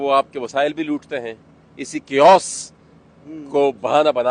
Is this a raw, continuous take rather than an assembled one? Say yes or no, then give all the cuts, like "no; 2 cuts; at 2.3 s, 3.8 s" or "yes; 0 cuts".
yes; 0 cuts